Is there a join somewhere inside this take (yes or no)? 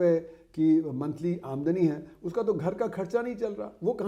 no